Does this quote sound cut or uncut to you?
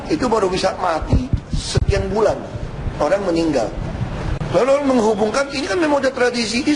uncut